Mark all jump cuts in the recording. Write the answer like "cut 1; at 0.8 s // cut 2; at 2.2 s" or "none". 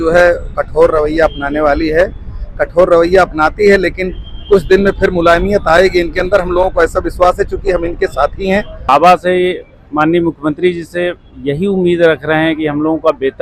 cut 1; at 8.9 s